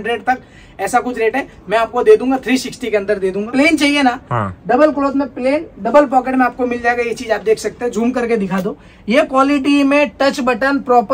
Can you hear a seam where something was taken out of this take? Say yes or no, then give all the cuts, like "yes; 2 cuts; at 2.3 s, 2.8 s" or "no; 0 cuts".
yes; 1 cut; at 3.5 s